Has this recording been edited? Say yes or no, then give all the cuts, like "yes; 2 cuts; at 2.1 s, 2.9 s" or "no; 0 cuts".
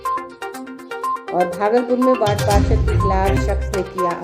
yes; 1 cut; at 1.1 s